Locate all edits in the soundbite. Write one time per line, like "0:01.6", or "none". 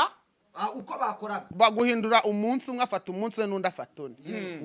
none

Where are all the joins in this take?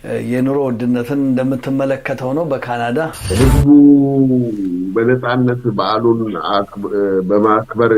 0:03.3

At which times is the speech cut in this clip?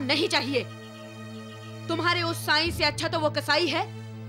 none

